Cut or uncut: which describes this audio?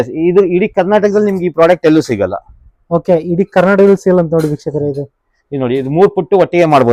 uncut